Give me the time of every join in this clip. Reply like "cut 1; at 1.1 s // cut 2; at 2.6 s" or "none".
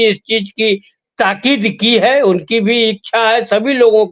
none